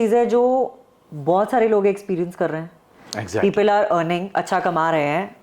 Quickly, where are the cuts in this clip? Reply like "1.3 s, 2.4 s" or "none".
none

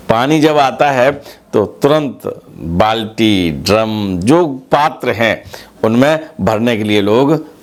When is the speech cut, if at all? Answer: none

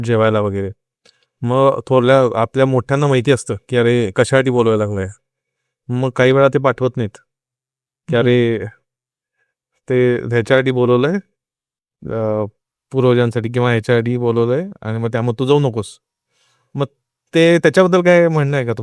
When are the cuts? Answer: none

